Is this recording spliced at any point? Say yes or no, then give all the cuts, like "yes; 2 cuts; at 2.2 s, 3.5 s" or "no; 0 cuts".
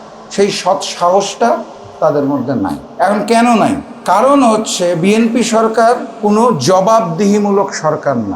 yes; 3 cuts; at 2.8 s, 3.9 s, 6.1 s